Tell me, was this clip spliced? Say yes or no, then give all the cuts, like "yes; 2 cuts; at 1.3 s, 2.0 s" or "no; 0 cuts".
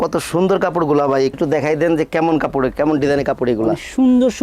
yes; 1 cut; at 1.4 s